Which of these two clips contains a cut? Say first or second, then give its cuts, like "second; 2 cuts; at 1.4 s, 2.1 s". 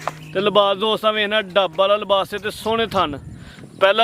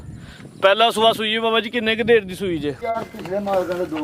second; 1 cut; at 2.8 s